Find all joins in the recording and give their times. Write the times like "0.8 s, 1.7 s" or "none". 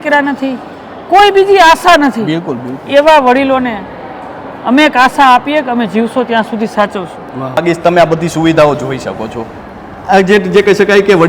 7.6 s